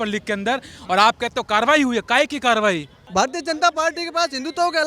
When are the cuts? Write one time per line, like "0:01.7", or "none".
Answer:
0:03.0